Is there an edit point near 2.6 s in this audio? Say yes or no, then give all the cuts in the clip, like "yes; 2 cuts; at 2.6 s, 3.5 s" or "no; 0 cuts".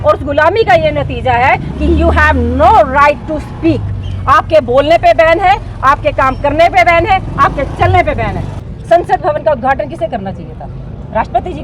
no; 1 cut; at 8.6 s